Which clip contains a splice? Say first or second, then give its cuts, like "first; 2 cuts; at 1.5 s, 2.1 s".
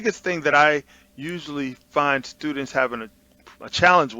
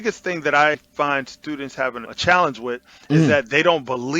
second; 2 cuts; at 0.8 s, 2.1 s